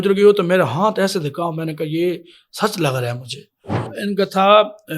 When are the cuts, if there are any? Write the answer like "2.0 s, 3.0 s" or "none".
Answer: 3.9 s